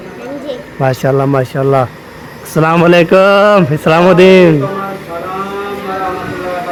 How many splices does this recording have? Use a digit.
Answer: 0